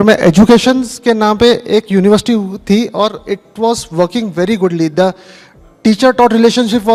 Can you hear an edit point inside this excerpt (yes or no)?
no